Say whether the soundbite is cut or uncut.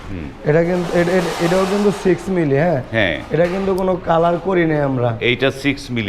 uncut